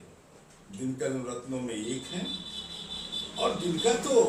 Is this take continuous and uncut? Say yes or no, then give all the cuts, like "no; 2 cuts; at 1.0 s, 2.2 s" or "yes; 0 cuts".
yes; 0 cuts